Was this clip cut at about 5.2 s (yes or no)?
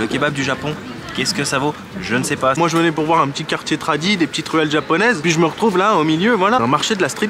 yes